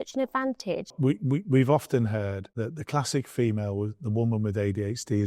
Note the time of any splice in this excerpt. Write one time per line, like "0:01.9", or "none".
0:00.9
0:02.4